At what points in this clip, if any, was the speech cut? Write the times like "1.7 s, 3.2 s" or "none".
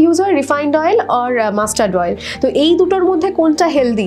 none